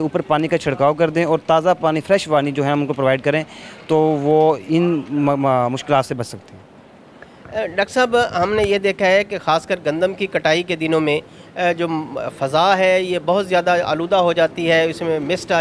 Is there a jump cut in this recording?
no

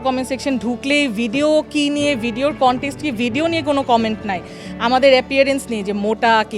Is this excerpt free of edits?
yes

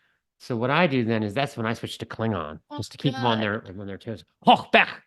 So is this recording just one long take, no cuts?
yes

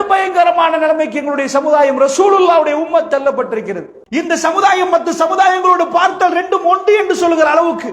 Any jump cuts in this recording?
yes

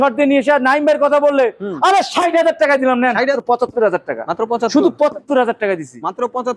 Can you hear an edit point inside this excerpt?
yes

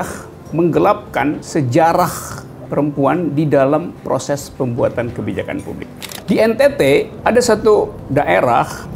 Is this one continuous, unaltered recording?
no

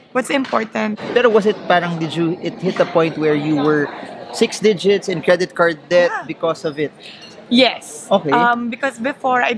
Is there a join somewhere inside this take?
yes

